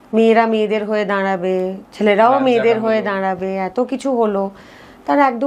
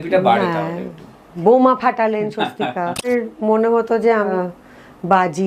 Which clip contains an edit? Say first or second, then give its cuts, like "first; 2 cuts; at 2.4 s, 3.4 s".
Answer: second; 2 cuts; at 3.1 s, 4.3 s